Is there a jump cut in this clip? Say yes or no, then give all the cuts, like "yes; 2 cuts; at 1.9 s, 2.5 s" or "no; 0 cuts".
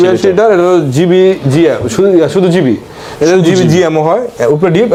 no; 0 cuts